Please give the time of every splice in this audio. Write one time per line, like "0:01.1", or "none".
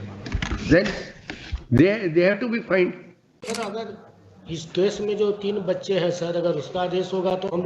0:03.3